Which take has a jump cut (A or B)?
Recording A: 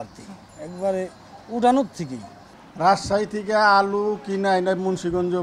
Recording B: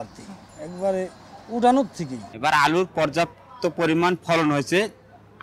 B